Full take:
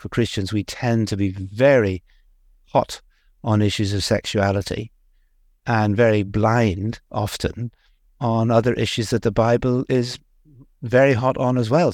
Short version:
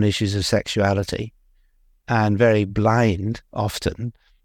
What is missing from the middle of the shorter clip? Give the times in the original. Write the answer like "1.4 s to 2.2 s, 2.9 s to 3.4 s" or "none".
none